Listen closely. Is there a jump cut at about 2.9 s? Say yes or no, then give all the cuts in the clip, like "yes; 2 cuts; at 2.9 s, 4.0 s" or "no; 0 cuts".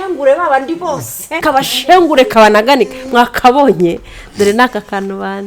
no; 1 cut; at 1.4 s